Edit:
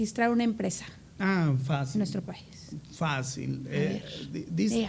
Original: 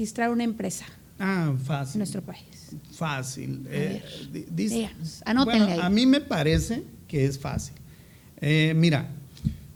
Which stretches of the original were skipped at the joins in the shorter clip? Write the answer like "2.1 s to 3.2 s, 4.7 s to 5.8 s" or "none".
none